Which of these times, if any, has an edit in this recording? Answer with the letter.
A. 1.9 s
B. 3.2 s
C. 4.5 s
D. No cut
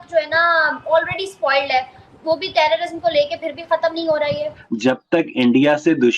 C